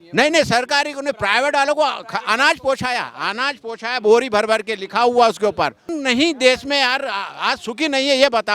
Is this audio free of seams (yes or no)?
no